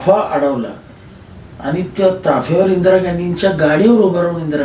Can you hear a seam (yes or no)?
no